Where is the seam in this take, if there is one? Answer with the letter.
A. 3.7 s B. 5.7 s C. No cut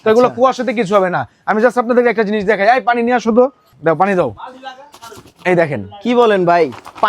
A